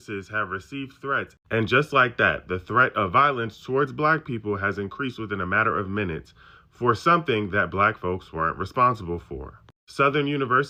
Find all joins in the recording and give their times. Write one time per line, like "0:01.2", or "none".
none

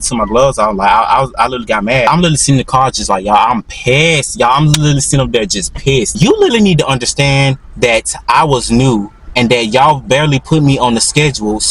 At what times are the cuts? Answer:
0:02.1
0:06.1

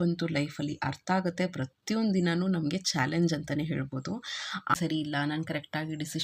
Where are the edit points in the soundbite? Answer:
0:04.7

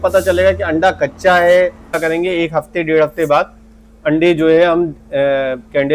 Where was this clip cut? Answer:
0:02.0

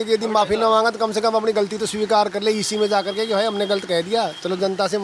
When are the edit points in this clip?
none

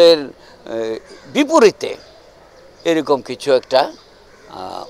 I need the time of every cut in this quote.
none

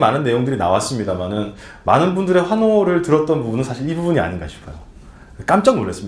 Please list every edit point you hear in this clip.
0:01.8

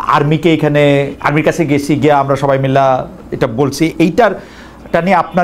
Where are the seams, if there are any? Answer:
none

